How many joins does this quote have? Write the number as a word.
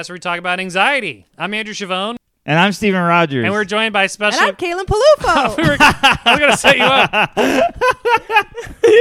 one